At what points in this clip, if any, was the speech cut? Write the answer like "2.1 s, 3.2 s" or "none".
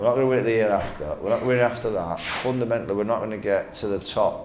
2.3 s